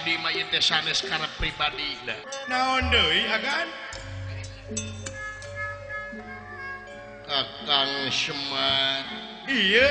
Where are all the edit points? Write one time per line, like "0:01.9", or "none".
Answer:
0:02.2